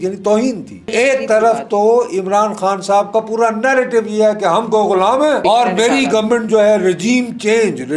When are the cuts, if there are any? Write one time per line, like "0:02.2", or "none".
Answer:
0:00.9
0:05.4